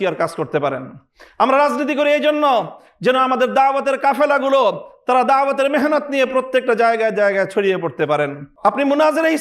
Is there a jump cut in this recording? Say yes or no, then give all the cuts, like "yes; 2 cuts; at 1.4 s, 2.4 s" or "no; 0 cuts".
yes; 1 cut; at 8.4 s